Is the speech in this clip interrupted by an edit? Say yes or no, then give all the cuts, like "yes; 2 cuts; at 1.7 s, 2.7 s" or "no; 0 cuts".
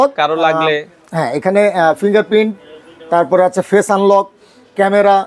no; 0 cuts